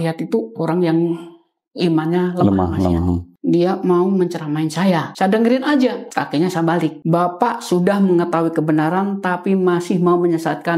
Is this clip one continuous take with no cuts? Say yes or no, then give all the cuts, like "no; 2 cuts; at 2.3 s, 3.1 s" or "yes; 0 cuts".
no; 4 cuts; at 3.3 s, 5.1 s, 6.0 s, 7.0 s